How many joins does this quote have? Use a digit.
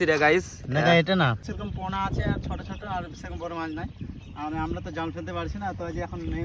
1